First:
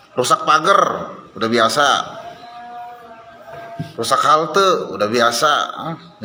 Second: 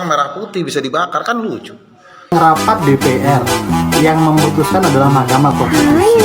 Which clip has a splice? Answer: second; 1 cut; at 2.3 s

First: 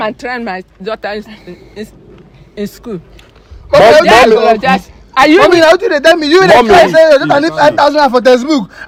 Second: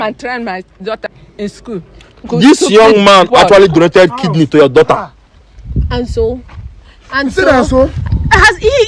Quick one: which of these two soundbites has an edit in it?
second; 2 cuts; at 1.1 s, 2.3 s

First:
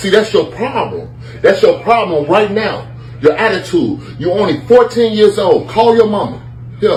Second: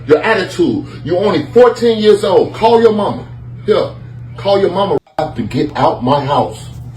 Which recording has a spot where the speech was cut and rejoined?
second; 1 cut; at 5.0 s

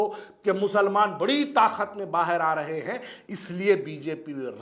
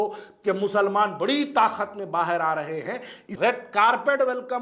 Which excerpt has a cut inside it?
second; 1 cut; at 3.3 s

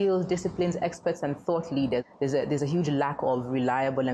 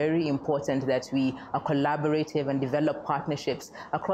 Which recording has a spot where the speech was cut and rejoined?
first; 1 cut; at 2.0 s

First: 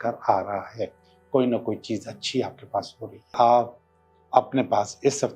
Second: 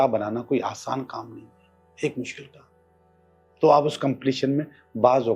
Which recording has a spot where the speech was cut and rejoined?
first; 1 cut; at 3.3 s

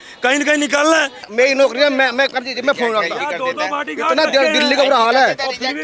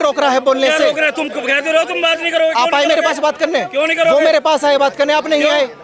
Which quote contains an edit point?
first; 1 cut; at 1.2 s

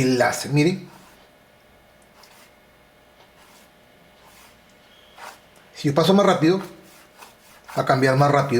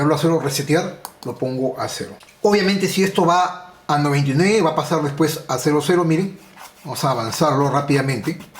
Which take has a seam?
second; 1 cut; at 2.2 s

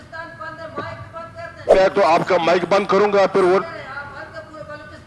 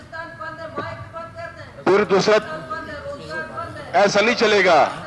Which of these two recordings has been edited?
first; 1 cut; at 1.7 s

